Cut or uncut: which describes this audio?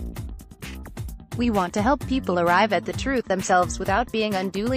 cut